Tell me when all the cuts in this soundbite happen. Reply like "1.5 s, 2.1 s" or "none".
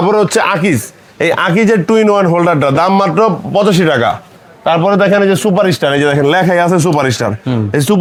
none